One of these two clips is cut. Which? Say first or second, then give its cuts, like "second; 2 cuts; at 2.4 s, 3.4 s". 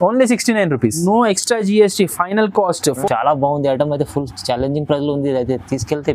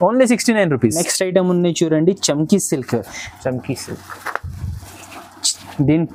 first; 2 cuts; at 1.0 s, 3.0 s